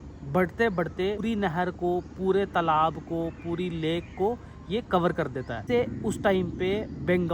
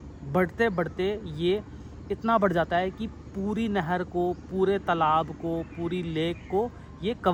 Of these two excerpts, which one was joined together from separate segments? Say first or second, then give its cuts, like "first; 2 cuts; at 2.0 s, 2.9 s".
first; 2 cuts; at 1.2 s, 5.6 s